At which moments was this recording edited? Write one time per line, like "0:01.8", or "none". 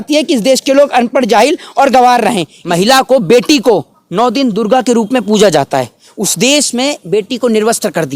0:02.5